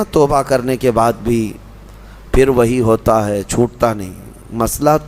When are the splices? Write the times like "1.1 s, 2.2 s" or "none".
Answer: none